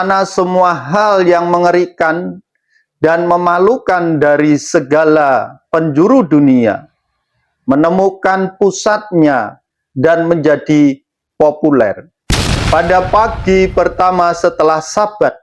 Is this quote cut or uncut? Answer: cut